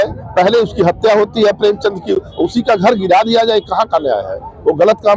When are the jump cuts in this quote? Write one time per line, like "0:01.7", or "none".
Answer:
none